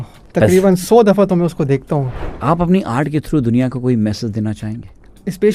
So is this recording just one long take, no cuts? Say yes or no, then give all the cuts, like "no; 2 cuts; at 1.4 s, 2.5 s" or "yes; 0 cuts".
no; 1 cut; at 2.1 s